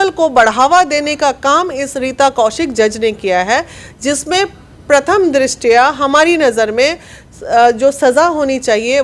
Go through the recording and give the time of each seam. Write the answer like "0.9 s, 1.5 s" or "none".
none